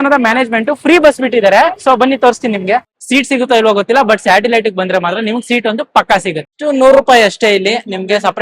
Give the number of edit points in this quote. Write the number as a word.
two